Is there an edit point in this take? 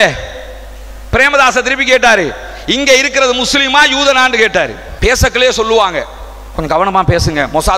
yes; 1 cut; at 4.8 s

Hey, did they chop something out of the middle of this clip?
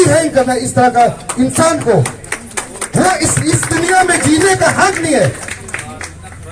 no; 0 cuts

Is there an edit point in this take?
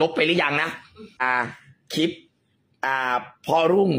yes; 1 cut; at 1.2 s

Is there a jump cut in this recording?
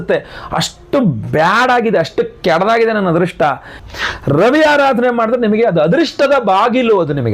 yes; 1 cut; at 3.7 s

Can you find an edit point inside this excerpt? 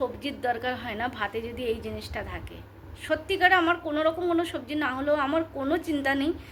no; 0 cuts

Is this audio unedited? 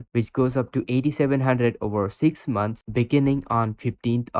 yes; 0 cuts

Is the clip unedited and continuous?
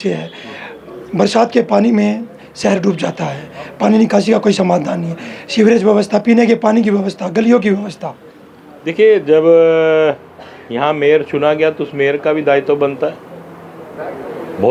yes; 0 cuts

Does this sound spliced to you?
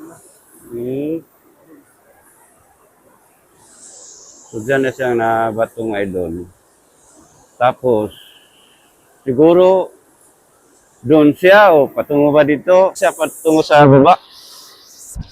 yes; 1 cut; at 13.0 s

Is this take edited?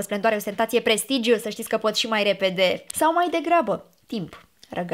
yes; 1 cut; at 2.9 s

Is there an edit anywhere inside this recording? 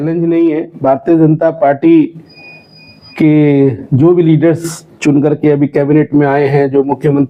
no; 0 cuts

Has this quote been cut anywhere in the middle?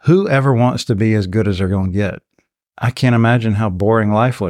no; 0 cuts

